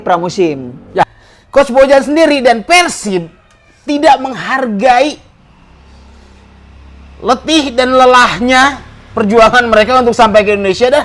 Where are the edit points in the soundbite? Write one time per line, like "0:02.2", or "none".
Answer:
0:01.1